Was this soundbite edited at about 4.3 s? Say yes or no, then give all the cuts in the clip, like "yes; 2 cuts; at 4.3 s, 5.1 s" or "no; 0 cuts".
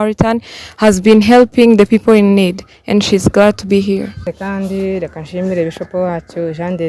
yes; 1 cut; at 4.3 s